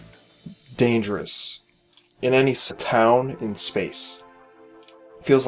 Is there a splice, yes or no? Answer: no